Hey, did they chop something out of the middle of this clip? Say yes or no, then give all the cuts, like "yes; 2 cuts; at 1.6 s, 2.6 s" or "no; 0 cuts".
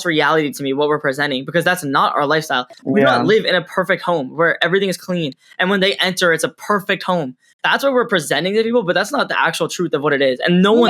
no; 0 cuts